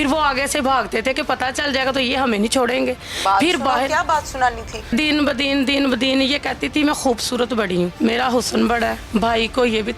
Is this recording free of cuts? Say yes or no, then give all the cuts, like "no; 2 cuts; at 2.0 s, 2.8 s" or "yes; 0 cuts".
no; 3 cuts; at 4.9 s, 7.9 s, 9.0 s